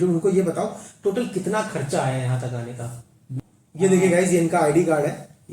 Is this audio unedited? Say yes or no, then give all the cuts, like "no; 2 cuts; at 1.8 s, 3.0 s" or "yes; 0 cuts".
no; 1 cut; at 3.4 s